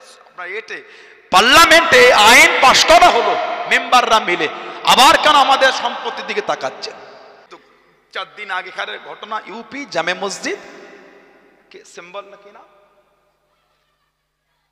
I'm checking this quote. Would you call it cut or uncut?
cut